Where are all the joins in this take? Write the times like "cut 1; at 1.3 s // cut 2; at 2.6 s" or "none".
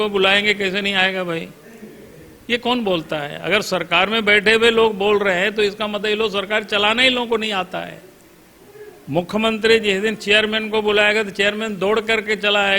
none